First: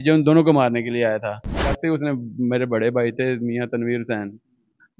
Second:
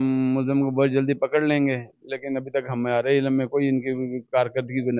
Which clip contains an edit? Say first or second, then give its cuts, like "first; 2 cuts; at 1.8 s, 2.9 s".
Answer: first; 1 cut; at 1.7 s